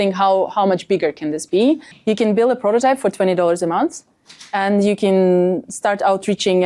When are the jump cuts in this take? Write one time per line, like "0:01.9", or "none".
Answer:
0:01.9